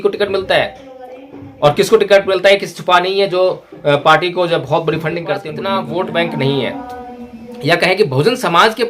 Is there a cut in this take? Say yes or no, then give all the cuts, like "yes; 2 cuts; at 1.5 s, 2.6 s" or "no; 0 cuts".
yes; 1 cut; at 5.5 s